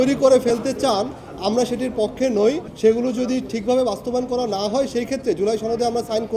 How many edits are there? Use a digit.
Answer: 1